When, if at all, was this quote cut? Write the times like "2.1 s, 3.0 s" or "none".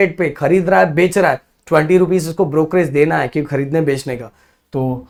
none